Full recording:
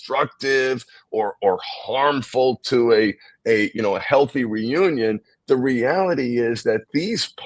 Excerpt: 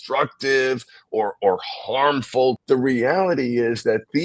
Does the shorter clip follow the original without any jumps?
no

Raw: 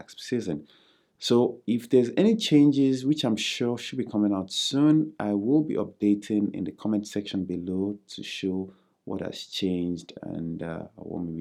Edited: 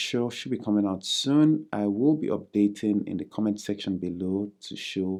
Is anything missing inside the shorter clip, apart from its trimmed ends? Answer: no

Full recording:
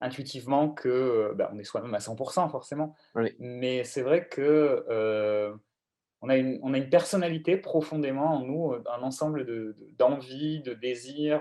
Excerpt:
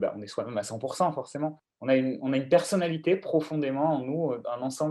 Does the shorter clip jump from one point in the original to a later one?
yes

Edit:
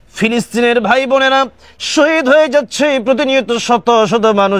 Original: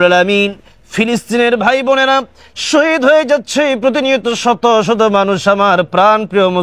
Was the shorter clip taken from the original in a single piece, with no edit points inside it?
yes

